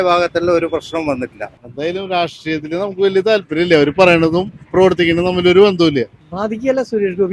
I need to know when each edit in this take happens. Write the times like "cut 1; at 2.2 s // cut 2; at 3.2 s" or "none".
cut 1; at 1.6 s // cut 2; at 6.2 s